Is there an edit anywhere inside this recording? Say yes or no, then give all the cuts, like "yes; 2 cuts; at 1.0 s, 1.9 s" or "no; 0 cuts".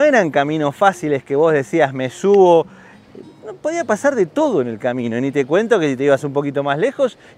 no; 0 cuts